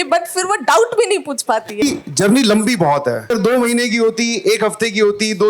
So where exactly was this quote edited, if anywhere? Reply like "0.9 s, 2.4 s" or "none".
1.8 s, 3.3 s